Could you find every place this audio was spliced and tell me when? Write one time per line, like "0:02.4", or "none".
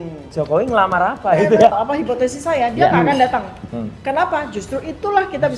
0:01.7